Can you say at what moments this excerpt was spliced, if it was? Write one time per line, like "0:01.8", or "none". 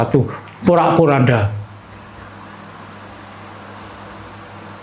none

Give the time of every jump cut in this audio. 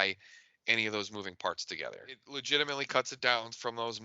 0:02.3

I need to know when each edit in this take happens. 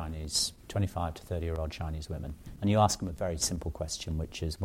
0:02.4

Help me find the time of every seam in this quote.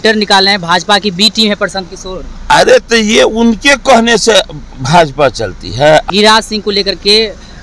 0:06.1

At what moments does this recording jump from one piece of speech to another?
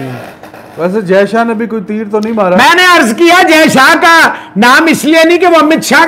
none

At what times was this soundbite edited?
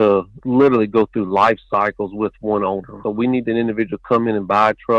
none

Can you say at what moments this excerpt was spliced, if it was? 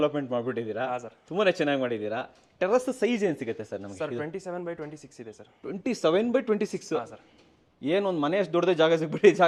none

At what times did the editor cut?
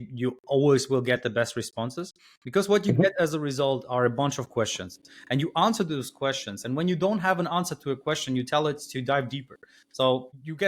none

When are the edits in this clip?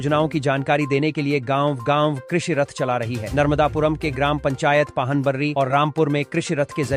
none

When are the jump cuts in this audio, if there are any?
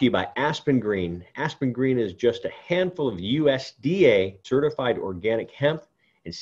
0:04.4

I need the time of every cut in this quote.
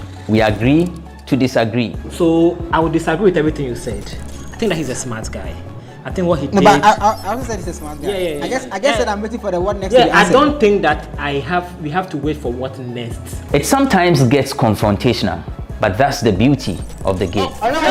none

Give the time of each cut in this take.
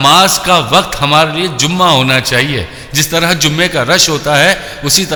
none

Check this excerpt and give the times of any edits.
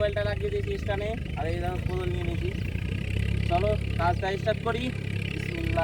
none

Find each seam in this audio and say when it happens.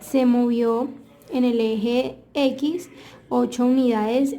none

